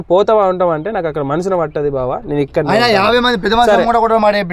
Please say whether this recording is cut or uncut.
uncut